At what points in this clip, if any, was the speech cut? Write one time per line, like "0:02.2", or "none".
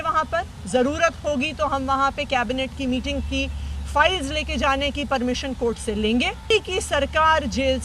0:06.5